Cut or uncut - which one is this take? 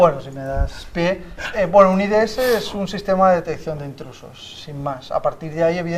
cut